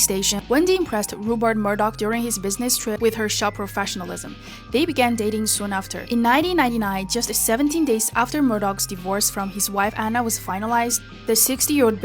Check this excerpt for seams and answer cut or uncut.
cut